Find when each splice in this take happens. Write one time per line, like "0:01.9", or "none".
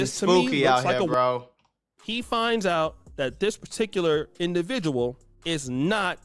0:01.9

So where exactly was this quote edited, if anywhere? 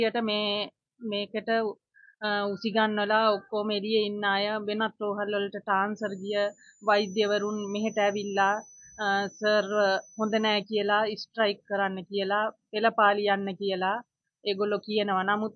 none

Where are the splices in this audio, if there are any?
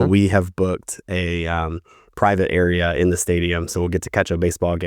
none

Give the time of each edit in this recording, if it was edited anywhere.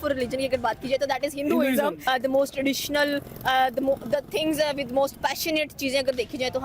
0:02.0

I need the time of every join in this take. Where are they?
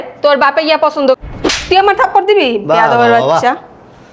0:01.2

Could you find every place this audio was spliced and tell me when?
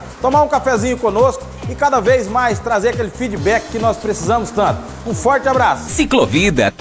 0:05.9

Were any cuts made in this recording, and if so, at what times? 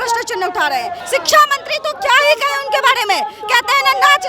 0:01.0

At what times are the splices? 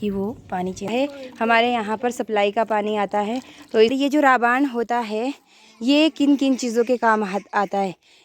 0:00.9
0:03.9

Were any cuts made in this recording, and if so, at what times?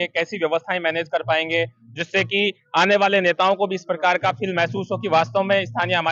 none

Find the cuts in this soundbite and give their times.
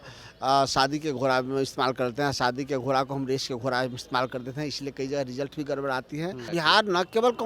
0:06.4

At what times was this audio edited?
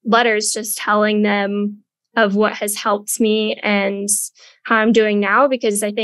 none

